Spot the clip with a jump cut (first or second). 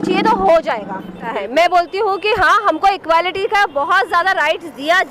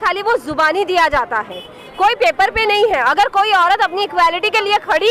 first